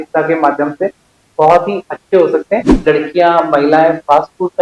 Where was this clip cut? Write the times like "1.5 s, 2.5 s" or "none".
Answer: 2.7 s